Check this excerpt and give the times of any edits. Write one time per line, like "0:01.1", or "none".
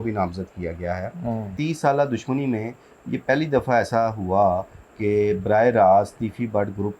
0:01.5